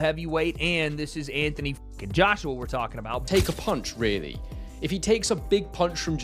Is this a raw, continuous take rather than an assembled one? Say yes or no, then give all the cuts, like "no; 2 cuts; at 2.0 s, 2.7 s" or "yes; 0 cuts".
no; 1 cut; at 3.2 s